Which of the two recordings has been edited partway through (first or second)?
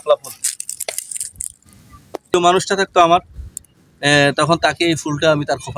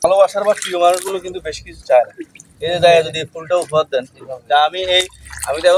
first